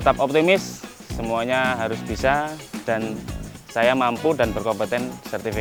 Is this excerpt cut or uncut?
uncut